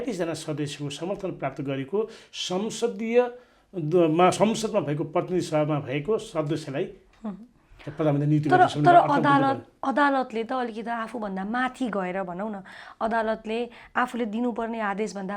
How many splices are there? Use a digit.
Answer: 0